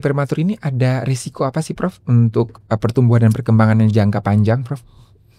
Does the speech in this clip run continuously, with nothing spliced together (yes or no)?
yes